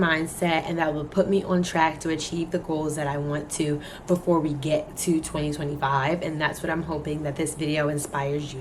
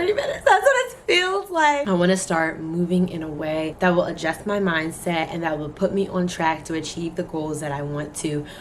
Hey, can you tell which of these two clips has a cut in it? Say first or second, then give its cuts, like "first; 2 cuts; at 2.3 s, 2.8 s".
second; 2 cuts; at 1.8 s, 3.7 s